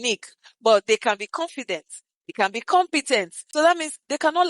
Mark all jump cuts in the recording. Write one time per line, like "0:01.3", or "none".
0:03.4